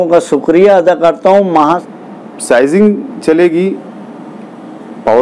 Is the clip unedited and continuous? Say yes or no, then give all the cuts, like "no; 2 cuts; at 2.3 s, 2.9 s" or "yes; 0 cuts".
no; 1 cut; at 1.8 s